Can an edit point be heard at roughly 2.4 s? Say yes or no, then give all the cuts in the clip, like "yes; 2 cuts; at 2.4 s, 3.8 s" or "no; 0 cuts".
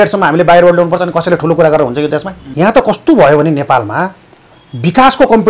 yes; 1 cut; at 2.4 s